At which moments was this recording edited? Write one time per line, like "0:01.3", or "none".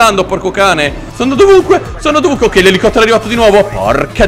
0:01.1